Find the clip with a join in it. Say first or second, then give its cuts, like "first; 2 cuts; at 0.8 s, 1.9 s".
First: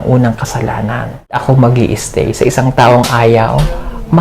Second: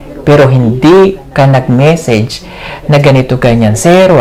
first; 1 cut; at 1.4 s